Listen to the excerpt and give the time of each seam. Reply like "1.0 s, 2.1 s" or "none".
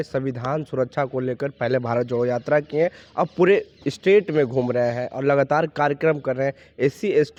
none